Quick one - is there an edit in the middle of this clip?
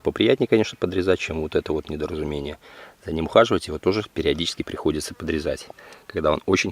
no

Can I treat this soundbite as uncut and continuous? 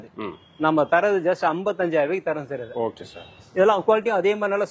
yes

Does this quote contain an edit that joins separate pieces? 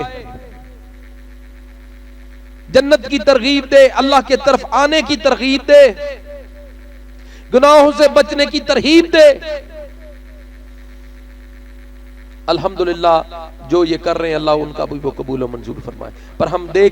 no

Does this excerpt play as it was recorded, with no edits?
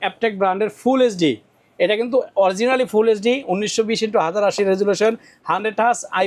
yes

